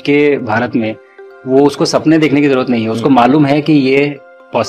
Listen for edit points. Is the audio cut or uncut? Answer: uncut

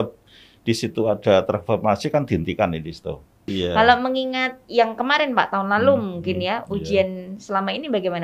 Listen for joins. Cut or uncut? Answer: cut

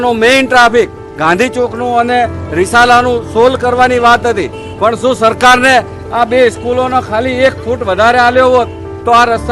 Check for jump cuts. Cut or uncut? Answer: uncut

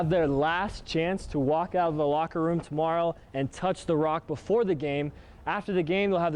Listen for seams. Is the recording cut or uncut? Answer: uncut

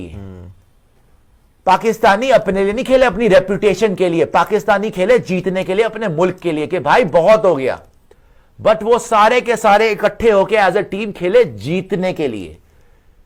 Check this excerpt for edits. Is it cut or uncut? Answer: uncut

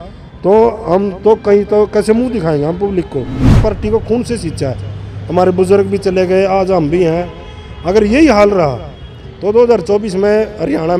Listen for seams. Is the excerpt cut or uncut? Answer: cut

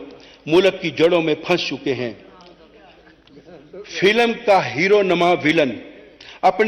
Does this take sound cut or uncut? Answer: uncut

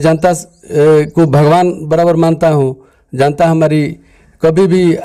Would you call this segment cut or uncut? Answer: uncut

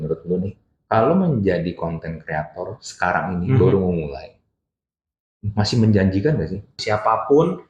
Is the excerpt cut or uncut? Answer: cut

